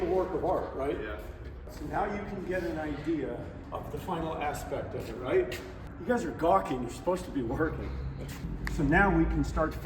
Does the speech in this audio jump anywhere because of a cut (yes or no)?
no